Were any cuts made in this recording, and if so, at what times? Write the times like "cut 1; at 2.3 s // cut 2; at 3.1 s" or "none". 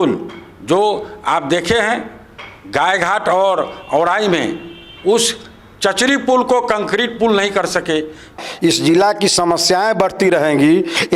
cut 1; at 8.4 s